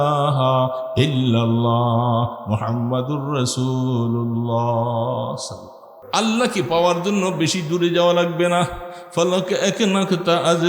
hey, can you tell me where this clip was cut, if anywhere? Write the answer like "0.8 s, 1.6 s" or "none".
5.9 s

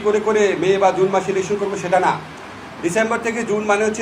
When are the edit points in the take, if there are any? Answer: none

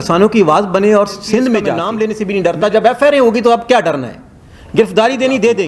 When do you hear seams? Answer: 1.8 s

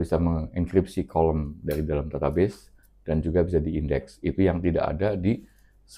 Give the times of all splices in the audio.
none

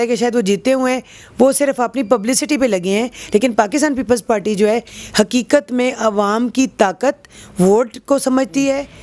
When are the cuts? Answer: none

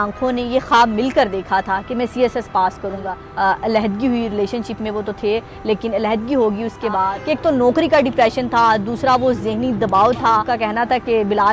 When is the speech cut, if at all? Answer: 3.2 s, 7.1 s, 10.5 s

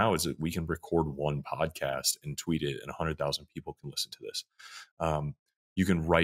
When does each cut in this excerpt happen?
none

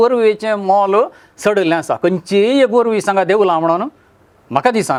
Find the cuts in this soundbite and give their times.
none

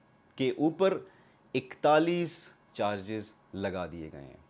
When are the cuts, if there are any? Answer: 2.6 s

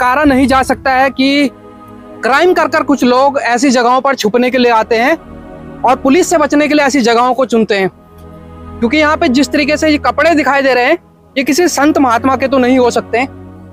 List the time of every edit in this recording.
none

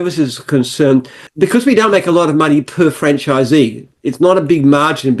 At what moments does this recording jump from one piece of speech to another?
1.2 s

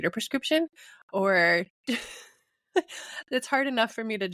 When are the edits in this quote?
none

